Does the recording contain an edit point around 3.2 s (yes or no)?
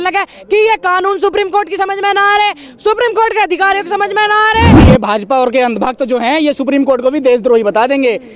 no